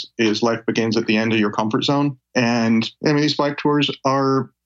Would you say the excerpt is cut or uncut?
cut